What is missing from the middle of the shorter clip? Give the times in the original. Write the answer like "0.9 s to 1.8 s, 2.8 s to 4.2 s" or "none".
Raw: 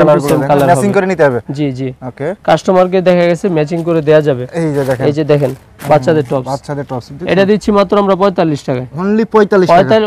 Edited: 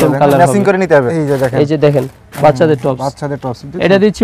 1.4 s to 4.6 s